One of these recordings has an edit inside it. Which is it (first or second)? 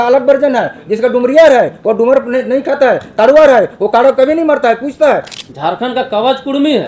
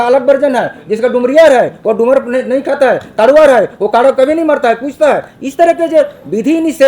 first